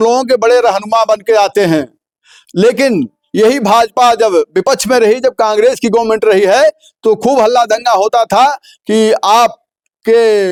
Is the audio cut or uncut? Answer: uncut